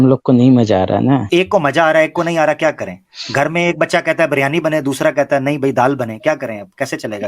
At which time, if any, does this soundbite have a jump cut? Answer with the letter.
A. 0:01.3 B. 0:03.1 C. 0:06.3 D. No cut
A